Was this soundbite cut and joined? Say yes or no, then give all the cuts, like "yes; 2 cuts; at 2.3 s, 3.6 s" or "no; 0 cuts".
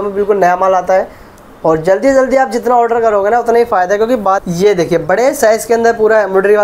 yes; 1 cut; at 4.4 s